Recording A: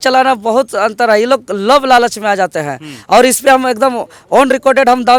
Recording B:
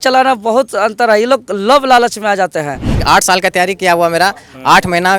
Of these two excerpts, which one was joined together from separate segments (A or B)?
B